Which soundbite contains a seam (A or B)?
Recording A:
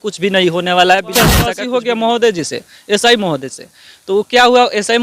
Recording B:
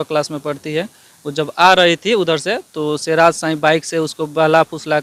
A